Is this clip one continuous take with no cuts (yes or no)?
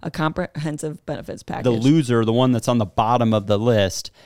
no